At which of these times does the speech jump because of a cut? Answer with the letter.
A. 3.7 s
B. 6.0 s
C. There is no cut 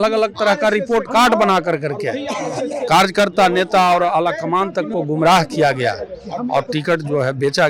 C